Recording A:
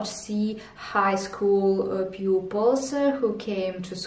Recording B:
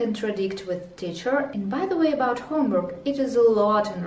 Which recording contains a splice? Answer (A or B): B